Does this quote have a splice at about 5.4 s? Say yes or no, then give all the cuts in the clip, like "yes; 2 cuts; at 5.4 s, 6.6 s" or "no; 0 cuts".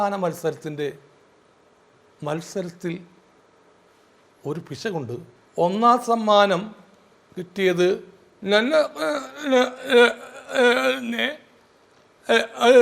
yes; 1 cut; at 5.4 s